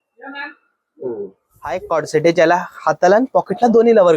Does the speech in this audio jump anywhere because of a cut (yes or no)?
yes